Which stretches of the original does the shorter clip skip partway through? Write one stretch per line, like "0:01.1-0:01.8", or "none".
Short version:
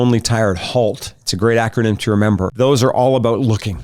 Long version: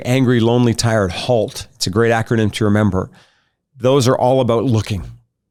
0:03.0-0:03.7